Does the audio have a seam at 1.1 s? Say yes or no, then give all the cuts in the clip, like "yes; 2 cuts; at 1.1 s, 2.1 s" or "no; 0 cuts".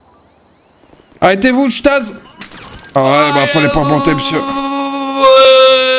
yes; 1 cut; at 1.1 s